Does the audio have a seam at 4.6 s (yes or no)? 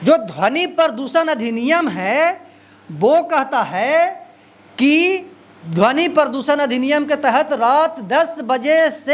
no